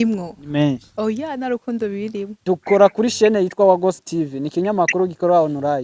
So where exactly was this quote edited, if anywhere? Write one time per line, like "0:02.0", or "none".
0:02.3